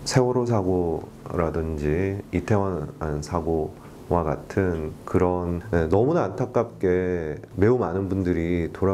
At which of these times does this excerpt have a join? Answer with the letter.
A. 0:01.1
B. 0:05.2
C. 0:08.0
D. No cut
D